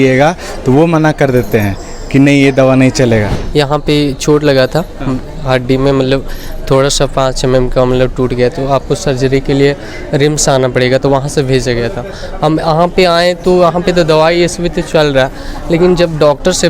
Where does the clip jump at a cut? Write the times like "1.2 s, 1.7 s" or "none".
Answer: 3.4 s